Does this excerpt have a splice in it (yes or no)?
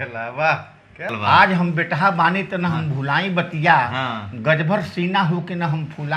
yes